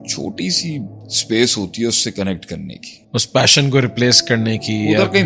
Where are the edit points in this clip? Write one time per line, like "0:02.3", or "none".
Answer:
0:01.1
0:03.0

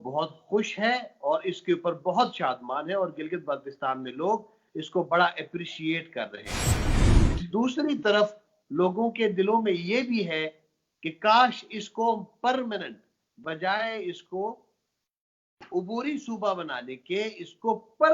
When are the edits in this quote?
none

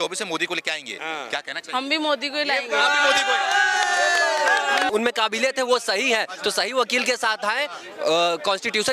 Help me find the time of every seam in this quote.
0:04.9

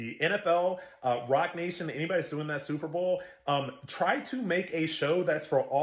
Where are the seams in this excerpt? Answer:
0:01.4

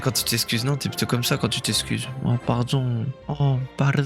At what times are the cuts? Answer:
none

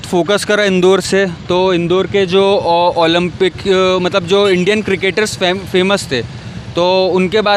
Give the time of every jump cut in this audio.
none

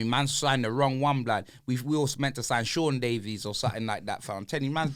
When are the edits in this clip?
none

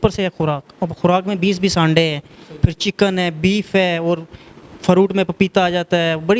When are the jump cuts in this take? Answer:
none

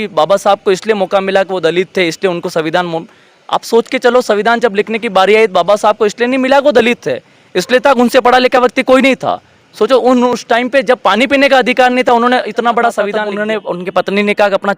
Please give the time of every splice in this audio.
0:13.3

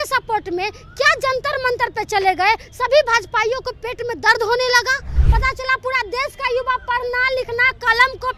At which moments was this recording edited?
0:05.2

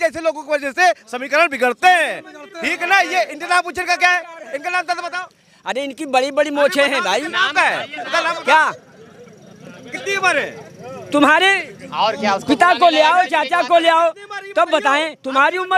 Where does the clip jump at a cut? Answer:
none

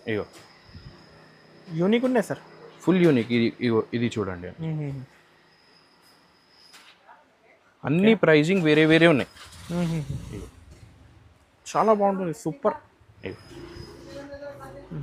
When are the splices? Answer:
none

